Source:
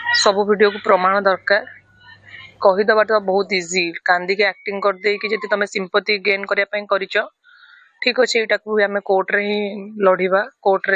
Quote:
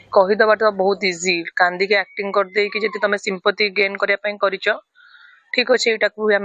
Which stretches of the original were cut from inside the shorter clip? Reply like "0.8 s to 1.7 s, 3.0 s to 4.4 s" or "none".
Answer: none